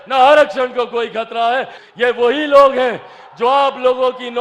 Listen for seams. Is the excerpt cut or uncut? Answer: cut